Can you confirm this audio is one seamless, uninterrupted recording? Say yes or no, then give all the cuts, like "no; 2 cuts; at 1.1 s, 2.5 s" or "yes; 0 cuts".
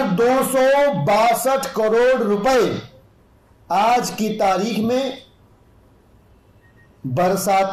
yes; 0 cuts